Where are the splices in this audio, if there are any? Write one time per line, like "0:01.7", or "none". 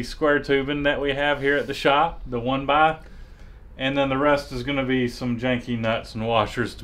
none